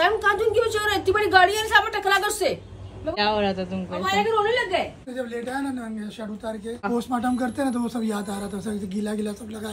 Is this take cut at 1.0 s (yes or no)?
no